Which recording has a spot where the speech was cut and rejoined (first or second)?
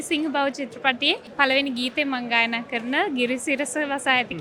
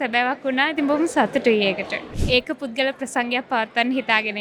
second